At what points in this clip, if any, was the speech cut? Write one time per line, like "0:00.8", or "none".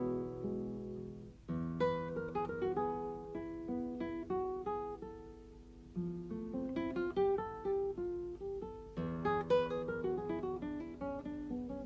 0:03.8